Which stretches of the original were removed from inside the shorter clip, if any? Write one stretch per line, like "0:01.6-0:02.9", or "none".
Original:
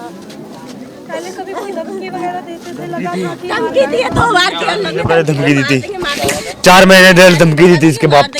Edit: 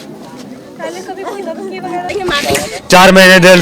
0:02.4-0:05.9